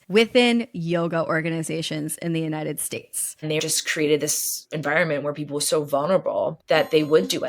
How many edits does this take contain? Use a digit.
1